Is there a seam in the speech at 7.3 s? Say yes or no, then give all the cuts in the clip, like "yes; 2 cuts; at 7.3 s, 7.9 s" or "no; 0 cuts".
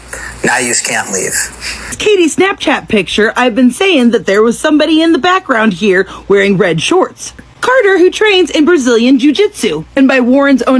yes; 2 cuts; at 2.0 s, 7.3 s